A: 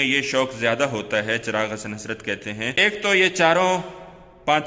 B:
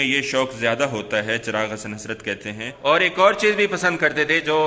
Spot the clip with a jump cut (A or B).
B